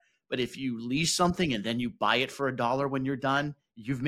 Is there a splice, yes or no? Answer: no